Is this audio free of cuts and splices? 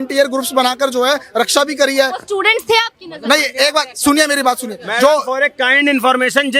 yes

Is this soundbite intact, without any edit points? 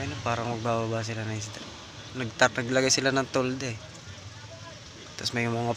yes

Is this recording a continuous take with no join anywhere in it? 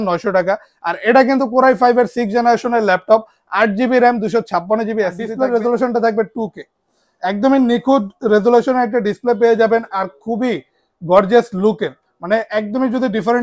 no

